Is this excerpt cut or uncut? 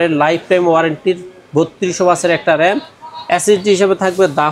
uncut